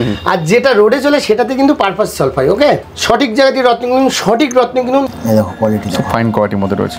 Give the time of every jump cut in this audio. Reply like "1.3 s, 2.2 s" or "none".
2.9 s, 5.0 s